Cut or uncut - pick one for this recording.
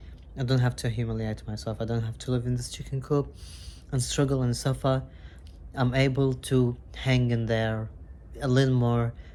uncut